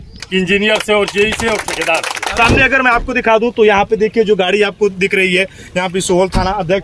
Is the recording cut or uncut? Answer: cut